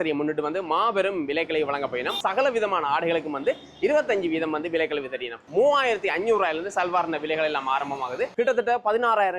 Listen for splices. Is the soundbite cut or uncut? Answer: cut